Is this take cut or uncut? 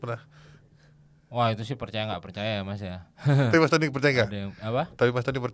uncut